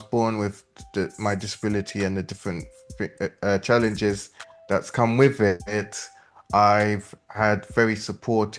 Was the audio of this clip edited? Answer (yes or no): no